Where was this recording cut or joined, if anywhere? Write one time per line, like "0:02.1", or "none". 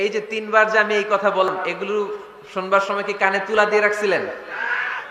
0:01.5